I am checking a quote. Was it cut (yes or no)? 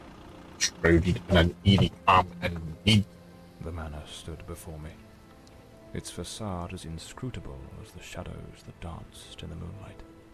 no